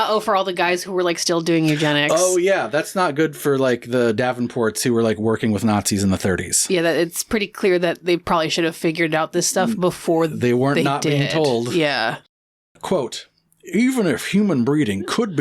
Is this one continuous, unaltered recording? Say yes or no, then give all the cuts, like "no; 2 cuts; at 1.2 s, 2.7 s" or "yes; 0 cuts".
no; 1 cut; at 12.8 s